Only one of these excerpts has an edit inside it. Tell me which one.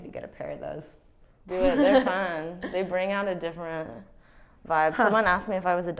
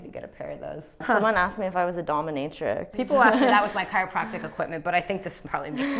second; 2 cuts; at 1.0 s, 2.9 s

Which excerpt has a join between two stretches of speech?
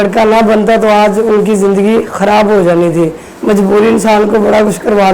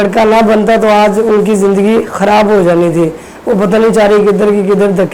first; 1 cut; at 3.3 s

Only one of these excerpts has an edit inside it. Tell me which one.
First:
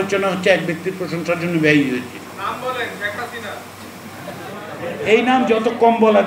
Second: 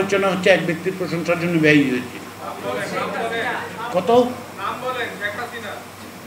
first; 1 cut; at 2.3 s

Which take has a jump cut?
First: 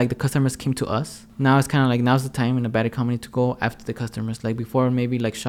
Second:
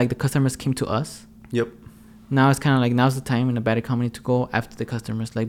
first; 1 cut; at 1.2 s

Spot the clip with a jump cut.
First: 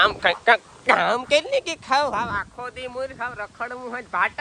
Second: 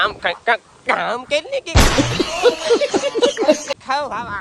first; 1 cut; at 1.7 s

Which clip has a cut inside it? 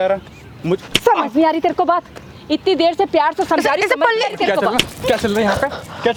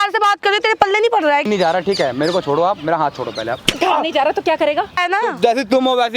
second; 2 cuts; at 1.4 s, 5.0 s

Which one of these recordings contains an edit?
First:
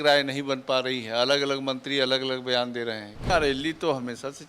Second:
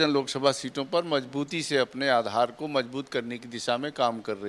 first; 1 cut; at 3.3 s

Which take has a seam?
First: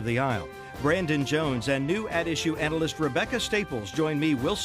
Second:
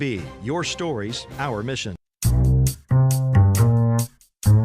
second; 1 cut; at 2.0 s

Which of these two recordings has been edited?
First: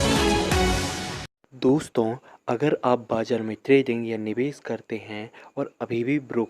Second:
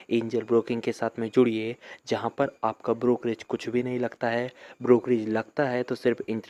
first; 1 cut; at 1.4 s

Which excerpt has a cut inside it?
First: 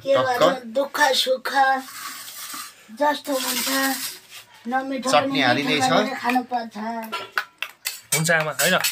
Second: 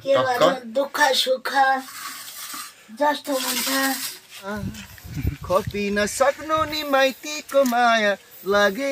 second; 1 cut; at 4.5 s

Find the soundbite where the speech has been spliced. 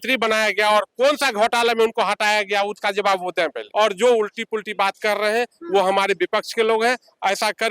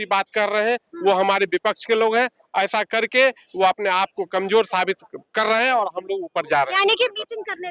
first; 1 cut; at 3.6 s

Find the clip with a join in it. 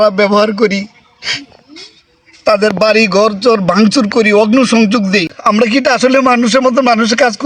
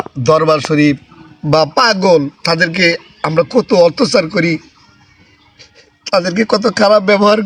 first; 1 cut; at 5.3 s

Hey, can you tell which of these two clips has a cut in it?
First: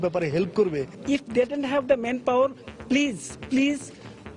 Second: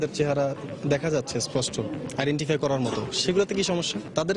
first; 1 cut; at 0.9 s

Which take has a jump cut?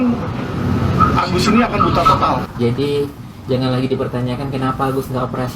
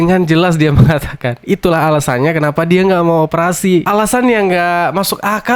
first; 1 cut; at 2.5 s

